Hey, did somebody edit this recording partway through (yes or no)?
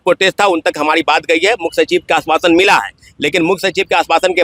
no